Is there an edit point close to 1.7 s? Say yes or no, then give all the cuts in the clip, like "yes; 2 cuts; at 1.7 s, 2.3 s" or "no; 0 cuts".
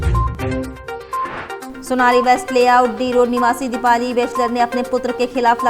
yes; 1 cut; at 1.7 s